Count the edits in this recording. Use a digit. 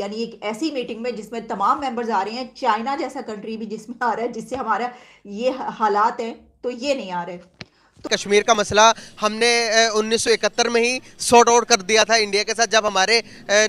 1